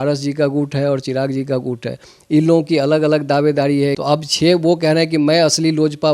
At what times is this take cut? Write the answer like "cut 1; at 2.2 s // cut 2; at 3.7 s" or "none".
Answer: cut 1; at 4.0 s